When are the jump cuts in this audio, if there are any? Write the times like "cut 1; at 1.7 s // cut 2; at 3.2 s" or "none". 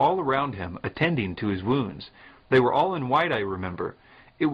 none